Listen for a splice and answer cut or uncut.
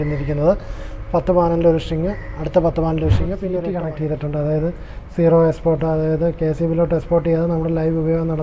cut